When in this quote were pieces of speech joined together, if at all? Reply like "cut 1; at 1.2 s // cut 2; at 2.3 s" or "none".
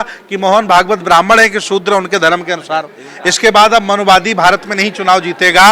cut 1; at 3.0 s